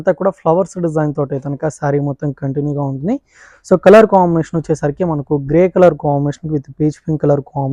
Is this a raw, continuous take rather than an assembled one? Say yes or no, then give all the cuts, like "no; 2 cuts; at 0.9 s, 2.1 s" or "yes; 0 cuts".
yes; 0 cuts